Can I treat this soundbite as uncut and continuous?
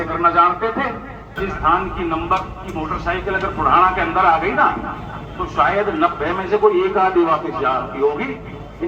no; 1 cut; at 1.4 s

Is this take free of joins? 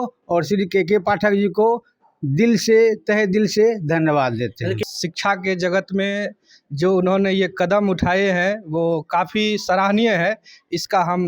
no; 1 cut; at 4.8 s

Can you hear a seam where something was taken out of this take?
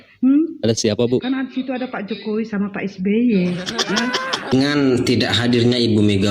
yes; 1 cut; at 4.5 s

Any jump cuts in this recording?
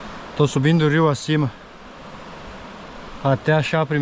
no; 0 cuts

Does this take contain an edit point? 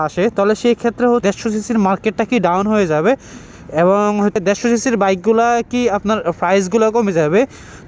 yes; 2 cuts; at 1.2 s, 4.4 s

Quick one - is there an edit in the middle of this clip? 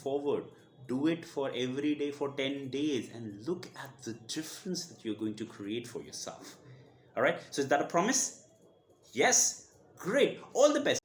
no; 0 cuts

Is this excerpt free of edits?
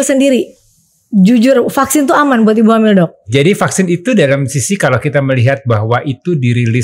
no; 1 cut; at 3.2 s

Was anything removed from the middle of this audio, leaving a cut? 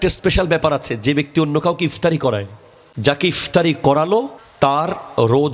yes; 2 cuts; at 2.2 s, 4.4 s

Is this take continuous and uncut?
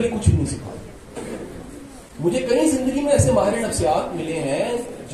no; 1 cut; at 1.0 s

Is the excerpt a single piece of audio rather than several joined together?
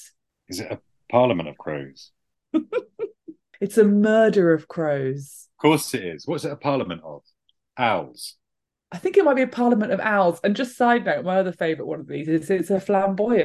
yes; 0 cuts

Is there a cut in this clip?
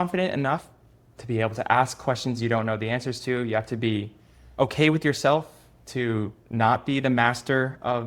no; 0 cuts

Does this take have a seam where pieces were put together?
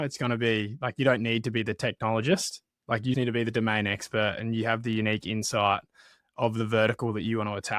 yes; 1 cut; at 3.1 s

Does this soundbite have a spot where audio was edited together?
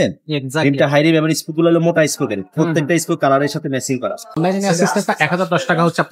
yes; 1 cut; at 4.4 s

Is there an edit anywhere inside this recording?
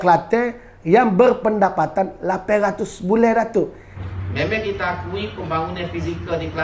yes; 1 cut; at 3.8 s

